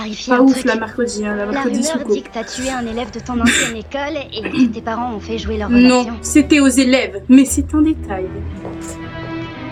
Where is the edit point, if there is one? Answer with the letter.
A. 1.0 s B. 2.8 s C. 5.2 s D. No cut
D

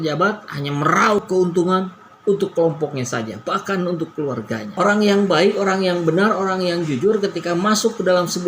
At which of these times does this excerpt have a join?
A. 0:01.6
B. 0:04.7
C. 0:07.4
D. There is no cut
B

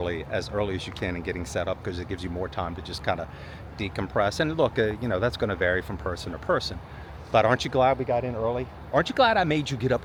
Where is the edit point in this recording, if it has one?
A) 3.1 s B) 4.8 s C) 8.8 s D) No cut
D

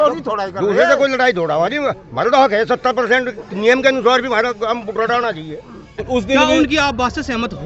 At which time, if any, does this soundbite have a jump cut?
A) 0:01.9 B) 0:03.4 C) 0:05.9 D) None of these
C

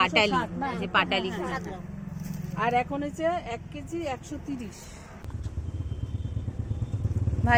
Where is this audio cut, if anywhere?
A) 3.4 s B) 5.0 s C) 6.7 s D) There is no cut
D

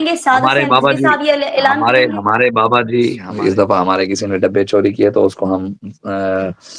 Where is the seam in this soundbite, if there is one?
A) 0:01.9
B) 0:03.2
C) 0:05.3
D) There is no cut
B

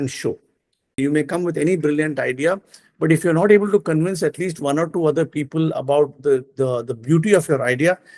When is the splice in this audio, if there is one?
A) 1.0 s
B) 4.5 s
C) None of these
A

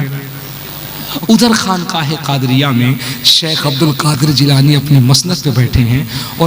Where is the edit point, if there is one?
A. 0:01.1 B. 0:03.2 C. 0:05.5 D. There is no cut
A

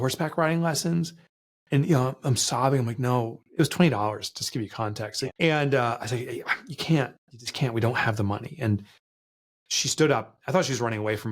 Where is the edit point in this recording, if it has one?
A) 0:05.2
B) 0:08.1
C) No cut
A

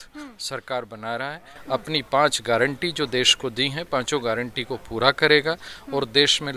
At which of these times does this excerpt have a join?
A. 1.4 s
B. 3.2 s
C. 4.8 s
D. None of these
D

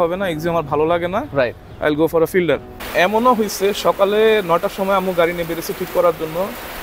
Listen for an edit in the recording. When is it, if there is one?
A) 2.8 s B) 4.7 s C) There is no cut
A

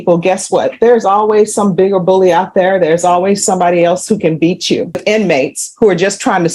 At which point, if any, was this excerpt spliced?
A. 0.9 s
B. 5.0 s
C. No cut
B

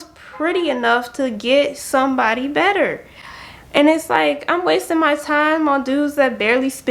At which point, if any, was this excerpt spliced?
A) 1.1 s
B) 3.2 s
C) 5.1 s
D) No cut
D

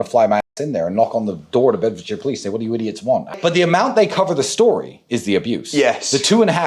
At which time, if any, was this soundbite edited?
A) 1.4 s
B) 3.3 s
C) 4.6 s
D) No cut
B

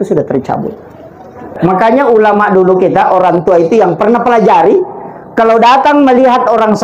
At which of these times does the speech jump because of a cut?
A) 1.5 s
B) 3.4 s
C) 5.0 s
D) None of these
A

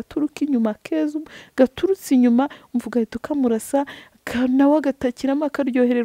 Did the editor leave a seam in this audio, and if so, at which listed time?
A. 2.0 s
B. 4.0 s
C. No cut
C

